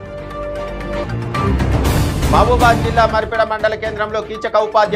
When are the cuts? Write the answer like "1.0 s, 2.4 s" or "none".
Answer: 1.0 s